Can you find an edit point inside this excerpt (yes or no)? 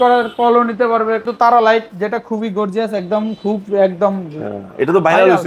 yes